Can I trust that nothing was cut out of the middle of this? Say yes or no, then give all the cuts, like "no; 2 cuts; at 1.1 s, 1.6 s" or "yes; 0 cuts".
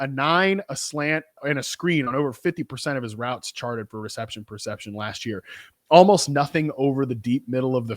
no; 1 cut; at 1.4 s